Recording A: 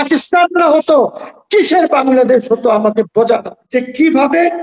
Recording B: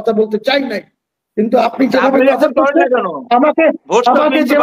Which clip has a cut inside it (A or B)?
A